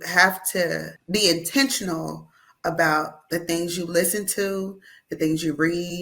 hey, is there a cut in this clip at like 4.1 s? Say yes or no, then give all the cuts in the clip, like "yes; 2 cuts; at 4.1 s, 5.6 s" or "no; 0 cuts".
no; 1 cut; at 0.9 s